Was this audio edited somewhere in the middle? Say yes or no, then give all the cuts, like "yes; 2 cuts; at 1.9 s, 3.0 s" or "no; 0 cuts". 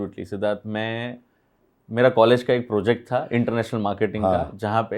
no; 0 cuts